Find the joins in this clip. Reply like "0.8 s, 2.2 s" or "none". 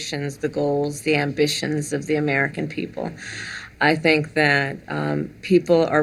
none

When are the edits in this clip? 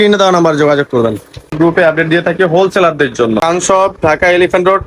1.4 s, 3.4 s

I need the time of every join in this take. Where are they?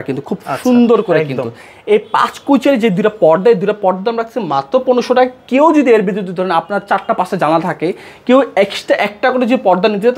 none

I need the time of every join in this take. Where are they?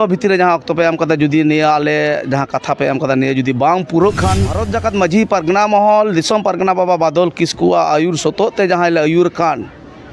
4.6 s

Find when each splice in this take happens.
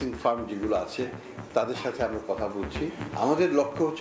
3.0 s

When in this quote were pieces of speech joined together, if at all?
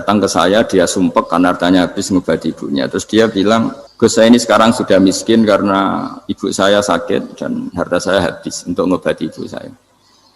3.8 s

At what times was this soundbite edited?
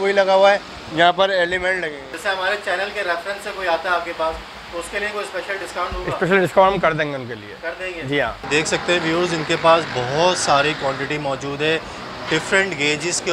2.1 s, 8.4 s

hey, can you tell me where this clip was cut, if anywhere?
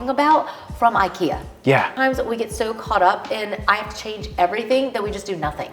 1.9 s

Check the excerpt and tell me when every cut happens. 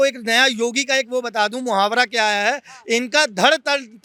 none

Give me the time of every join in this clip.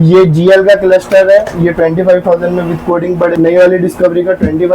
3.3 s

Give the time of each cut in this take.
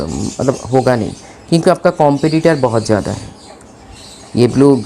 none

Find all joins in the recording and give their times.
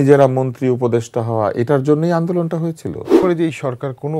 3.2 s

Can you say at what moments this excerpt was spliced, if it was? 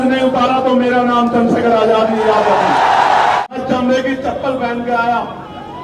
3.4 s

